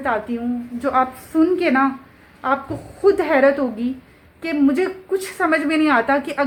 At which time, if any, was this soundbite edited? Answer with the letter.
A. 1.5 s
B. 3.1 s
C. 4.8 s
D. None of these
D